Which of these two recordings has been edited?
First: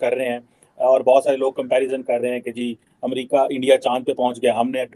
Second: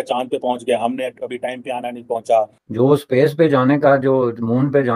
second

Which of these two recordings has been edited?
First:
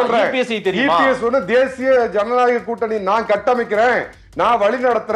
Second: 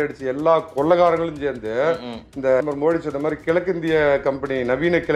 second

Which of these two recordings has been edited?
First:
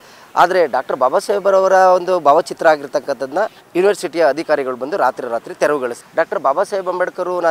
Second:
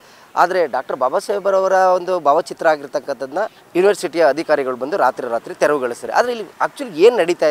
first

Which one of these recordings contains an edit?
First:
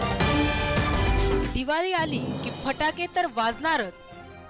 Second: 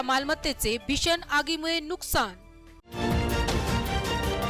first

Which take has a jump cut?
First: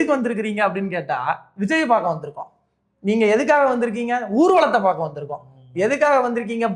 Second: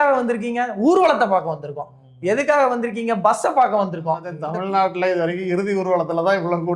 second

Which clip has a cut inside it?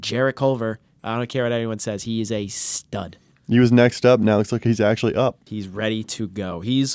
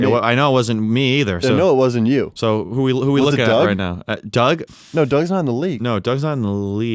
first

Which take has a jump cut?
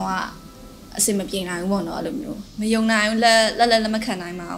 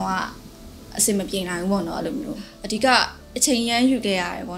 first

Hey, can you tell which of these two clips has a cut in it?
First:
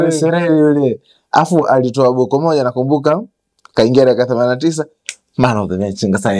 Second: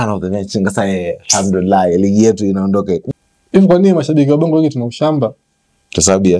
second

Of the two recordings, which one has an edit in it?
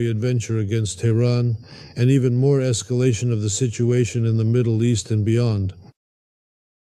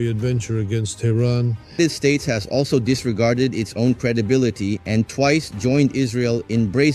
second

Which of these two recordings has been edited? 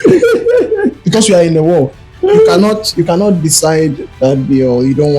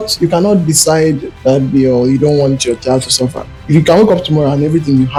first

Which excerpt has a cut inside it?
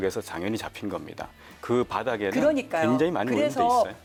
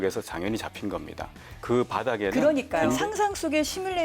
second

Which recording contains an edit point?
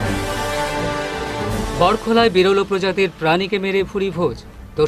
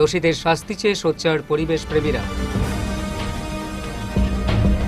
first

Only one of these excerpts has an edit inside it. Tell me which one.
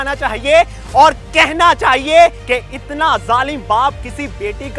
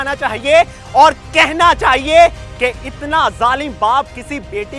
first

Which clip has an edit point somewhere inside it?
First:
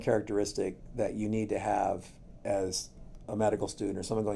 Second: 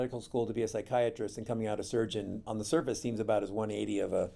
second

